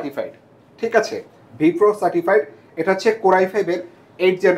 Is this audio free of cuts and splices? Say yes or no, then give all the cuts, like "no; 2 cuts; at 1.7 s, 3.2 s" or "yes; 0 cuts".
yes; 0 cuts